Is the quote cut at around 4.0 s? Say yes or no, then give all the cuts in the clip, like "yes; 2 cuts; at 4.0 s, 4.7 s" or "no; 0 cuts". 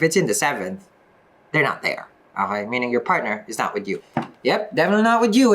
yes; 1 cut; at 4.0 s